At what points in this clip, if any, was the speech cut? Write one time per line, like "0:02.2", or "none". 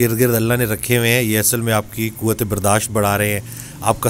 none